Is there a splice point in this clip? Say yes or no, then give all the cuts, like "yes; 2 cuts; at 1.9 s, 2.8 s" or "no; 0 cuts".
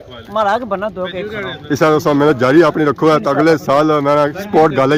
no; 0 cuts